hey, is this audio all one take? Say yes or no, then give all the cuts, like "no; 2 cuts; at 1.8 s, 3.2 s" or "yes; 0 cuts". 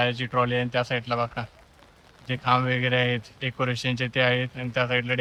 yes; 0 cuts